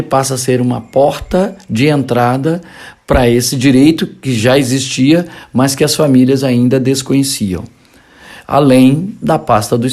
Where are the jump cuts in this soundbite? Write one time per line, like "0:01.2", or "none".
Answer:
0:03.5